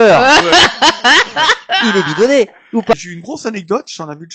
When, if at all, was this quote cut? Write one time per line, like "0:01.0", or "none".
0:02.9